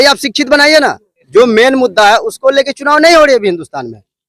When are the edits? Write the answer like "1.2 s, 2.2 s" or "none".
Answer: 1.1 s